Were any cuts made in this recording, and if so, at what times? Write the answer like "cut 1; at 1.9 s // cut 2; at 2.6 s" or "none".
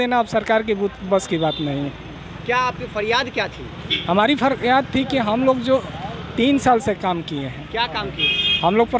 none